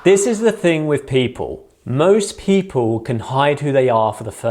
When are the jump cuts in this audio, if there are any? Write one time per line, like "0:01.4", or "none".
none